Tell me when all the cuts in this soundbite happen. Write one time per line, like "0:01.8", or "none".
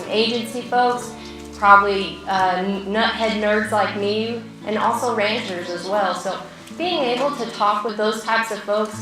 0:04.5
0:07.9